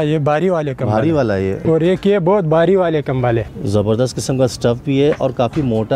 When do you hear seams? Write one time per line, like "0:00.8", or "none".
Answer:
0:01.6
0:03.5

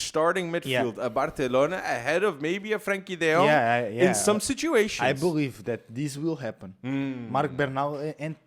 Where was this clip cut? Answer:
none

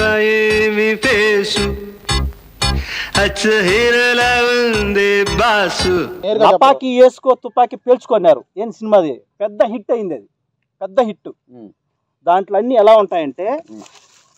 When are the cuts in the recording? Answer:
0:06.1

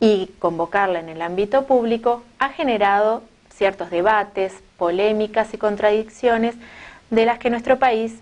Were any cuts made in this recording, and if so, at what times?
0:02.5

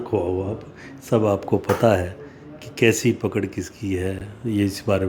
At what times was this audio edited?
none

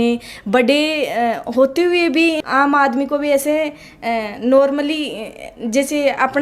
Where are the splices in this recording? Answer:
0:02.4

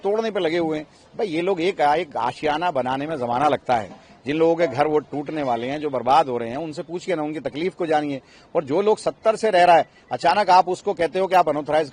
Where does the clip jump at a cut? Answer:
none

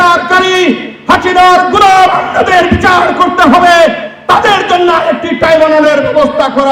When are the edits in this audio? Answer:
none

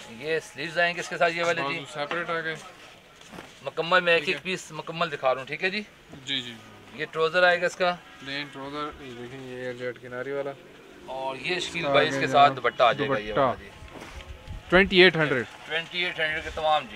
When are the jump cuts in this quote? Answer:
none

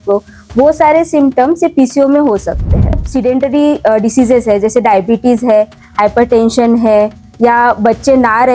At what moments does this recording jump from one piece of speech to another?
0:03.0

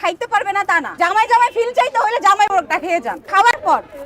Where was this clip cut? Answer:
0:00.9
0:03.2

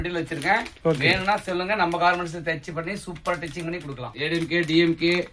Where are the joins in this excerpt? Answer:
0:04.1

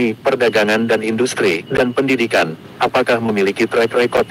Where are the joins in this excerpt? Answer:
0:03.3

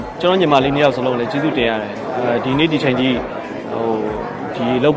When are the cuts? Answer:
none

